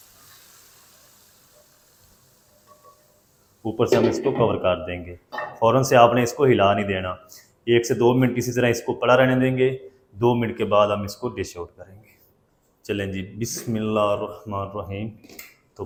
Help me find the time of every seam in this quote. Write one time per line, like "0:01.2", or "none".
none

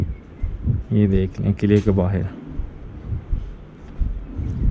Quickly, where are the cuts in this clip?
none

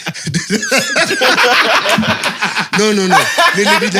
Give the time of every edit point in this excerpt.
none

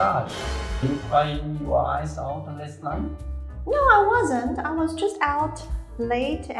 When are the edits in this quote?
none

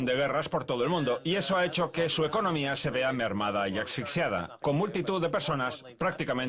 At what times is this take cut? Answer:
0:03.5

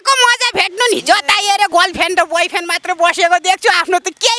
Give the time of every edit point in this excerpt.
0:01.7

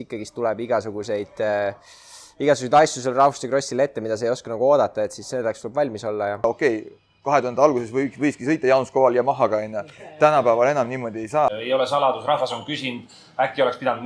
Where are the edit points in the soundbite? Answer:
0:06.4
0:11.6

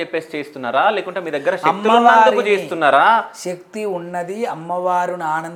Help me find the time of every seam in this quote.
none

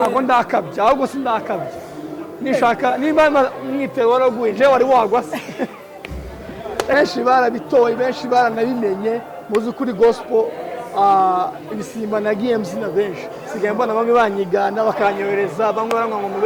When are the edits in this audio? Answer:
0:06.9

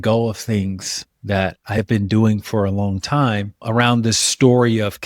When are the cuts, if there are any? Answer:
0:01.8
0:04.2

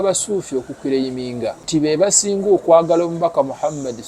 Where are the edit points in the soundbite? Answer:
0:01.6

